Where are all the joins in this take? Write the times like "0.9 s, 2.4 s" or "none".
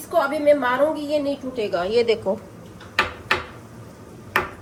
none